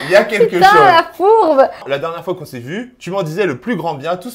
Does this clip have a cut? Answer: yes; 1 cut; at 1.8 s

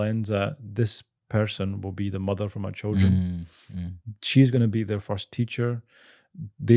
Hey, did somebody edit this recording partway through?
no; 0 cuts

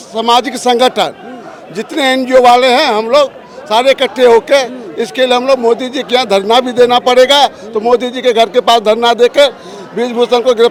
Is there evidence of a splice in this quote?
no; 0 cuts

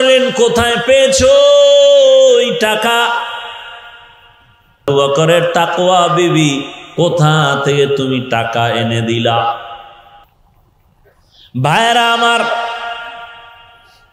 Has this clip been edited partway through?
yes; 1 cut; at 4.8 s

